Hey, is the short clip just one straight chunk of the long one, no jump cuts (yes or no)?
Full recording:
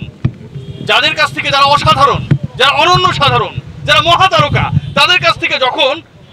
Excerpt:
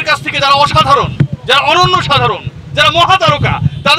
yes